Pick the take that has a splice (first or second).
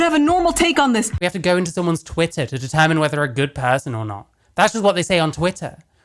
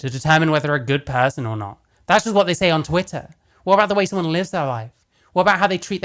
first